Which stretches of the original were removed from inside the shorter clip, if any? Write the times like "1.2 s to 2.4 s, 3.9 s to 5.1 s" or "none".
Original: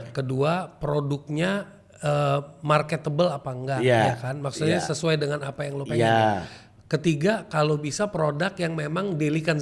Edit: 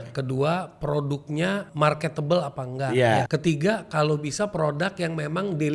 1.7 s to 2.6 s, 4.1 s to 6.9 s